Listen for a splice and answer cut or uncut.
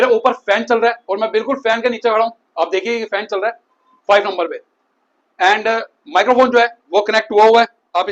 uncut